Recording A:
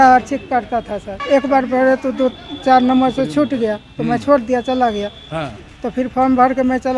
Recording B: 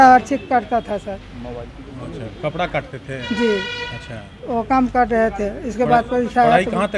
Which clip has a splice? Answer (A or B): A